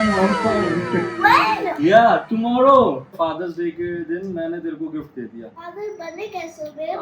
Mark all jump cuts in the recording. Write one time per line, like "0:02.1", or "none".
0:03.1
0:05.5